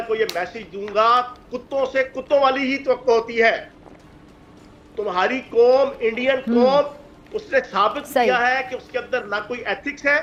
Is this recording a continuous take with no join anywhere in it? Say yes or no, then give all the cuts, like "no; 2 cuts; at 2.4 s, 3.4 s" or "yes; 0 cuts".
yes; 0 cuts